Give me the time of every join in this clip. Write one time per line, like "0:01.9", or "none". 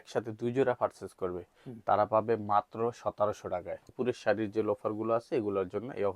0:03.9

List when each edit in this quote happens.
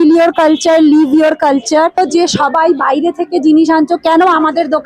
0:02.0

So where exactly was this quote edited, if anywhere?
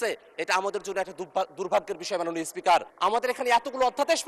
0:02.9

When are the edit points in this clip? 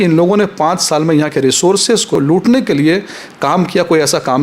0:02.2

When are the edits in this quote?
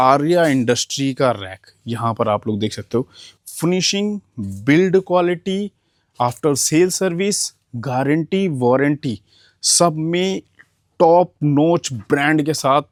none

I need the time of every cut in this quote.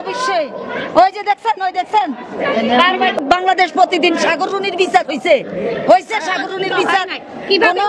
0:03.2

